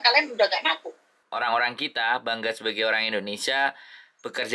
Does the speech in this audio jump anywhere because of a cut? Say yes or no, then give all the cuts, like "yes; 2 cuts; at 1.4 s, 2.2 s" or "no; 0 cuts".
yes; 1 cut; at 1.1 s